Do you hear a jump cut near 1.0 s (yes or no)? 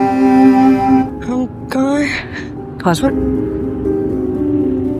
yes